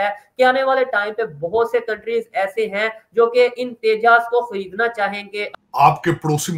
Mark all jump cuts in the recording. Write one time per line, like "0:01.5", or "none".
0:05.5